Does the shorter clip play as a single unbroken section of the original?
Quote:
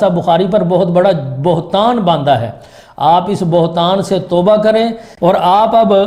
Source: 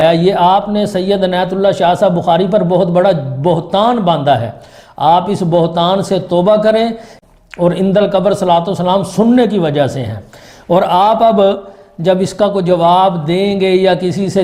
no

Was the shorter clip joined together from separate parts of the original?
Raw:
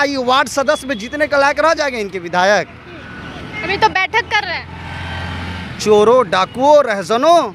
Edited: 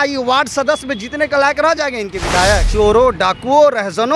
yes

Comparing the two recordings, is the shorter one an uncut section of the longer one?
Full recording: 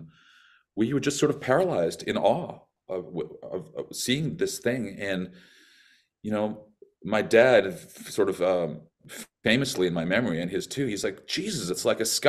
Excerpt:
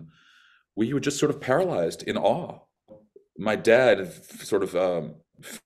no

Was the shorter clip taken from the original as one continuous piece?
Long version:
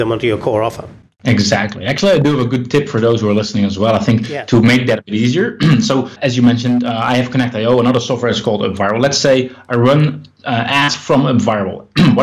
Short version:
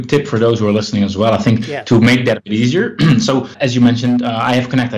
yes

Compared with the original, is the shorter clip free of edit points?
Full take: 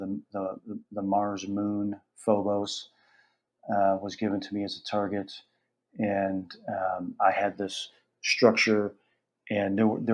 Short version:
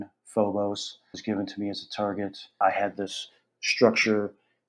no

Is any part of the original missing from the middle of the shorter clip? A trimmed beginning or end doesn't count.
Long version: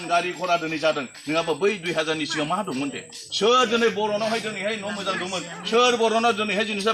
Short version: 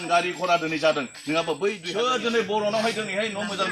yes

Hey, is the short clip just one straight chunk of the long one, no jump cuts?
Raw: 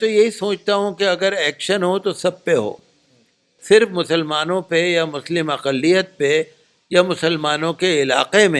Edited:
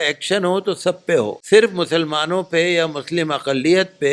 no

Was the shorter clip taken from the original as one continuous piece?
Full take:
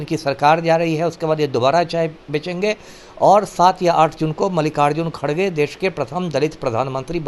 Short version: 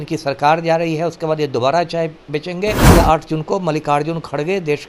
no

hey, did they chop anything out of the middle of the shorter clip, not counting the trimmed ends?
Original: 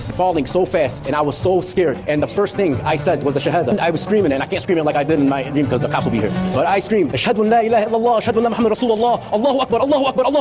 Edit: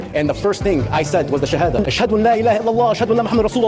yes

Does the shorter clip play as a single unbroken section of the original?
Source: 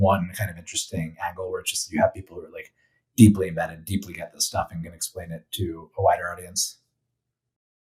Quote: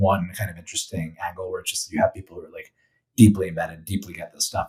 yes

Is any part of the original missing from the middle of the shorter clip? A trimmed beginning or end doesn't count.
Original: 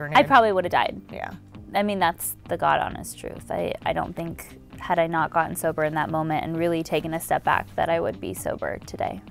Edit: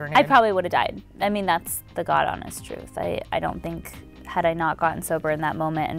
yes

